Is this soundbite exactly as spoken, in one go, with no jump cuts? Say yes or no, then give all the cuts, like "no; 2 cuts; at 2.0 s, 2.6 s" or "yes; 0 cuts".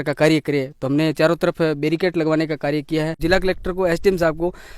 no; 1 cut; at 3.2 s